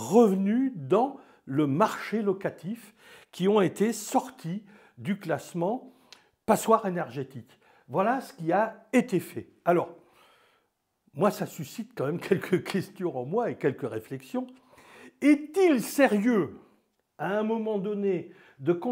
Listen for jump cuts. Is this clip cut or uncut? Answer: uncut